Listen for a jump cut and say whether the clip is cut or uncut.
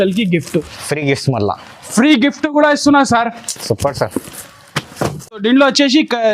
cut